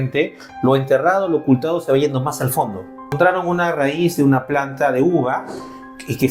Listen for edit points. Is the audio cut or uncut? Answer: cut